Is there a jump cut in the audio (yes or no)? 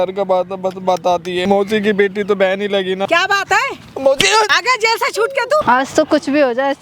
yes